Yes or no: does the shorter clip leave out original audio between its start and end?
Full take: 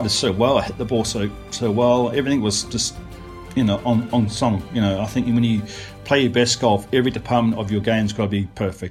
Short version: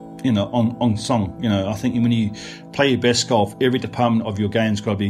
no